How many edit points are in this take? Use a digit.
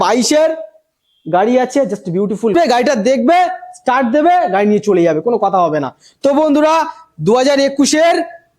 1